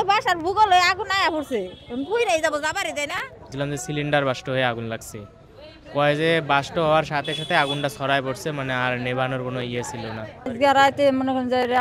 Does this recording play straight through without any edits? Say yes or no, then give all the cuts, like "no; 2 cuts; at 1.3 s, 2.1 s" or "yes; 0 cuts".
no; 2 cuts; at 3.4 s, 10.5 s